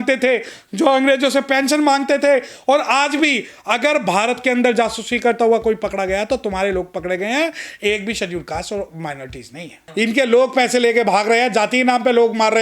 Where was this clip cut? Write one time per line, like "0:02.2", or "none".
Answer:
0:09.8